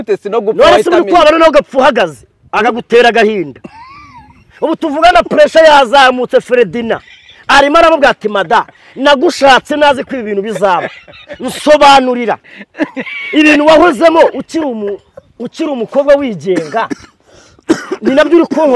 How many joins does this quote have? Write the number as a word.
zero